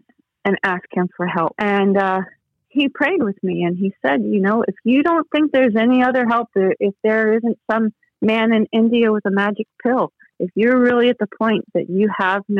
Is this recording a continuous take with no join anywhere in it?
yes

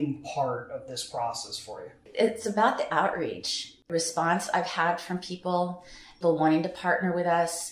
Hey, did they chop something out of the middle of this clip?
yes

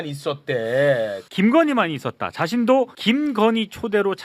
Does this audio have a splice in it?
yes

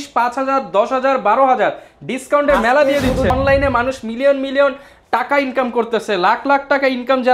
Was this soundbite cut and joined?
yes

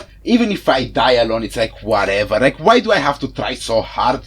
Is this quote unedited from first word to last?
yes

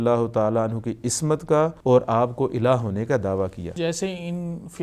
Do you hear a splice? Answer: yes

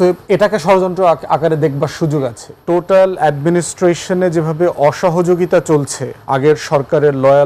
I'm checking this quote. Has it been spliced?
yes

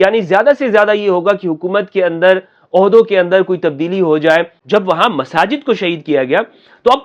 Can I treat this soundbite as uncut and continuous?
no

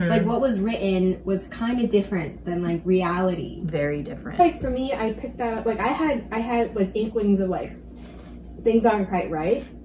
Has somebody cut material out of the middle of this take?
yes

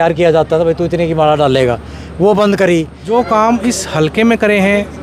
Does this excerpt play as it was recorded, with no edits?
no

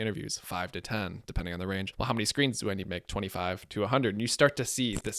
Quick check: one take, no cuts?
no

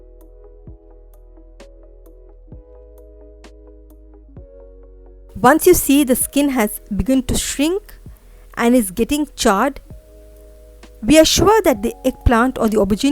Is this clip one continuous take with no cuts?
no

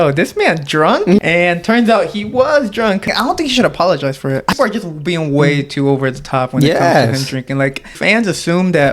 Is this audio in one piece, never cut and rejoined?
no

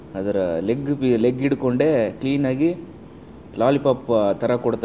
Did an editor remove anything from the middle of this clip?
no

